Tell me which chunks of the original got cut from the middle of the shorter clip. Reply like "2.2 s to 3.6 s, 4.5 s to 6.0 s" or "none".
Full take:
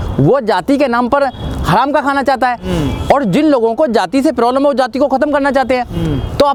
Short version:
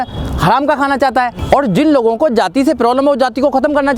2.6 s to 3.0 s